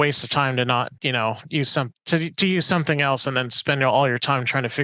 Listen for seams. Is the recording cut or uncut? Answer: cut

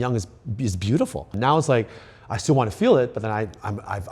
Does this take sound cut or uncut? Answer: cut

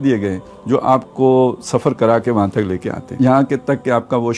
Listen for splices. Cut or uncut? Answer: cut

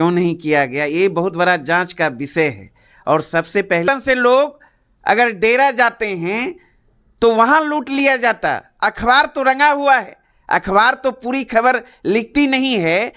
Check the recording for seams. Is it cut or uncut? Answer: cut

